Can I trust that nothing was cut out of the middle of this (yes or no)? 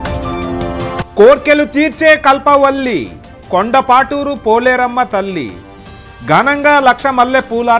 yes